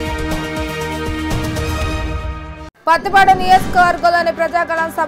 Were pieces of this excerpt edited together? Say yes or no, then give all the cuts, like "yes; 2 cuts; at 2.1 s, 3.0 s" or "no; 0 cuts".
yes; 1 cut; at 2.6 s